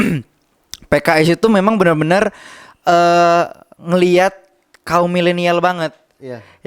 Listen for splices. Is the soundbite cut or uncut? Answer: uncut